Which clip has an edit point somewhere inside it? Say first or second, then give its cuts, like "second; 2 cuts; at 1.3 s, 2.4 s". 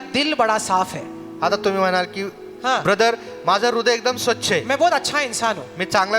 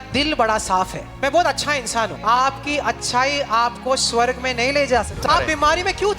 second; 3 cuts; at 1.2 s, 2.2 s, 5.1 s